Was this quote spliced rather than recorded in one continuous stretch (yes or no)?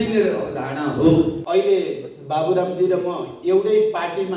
yes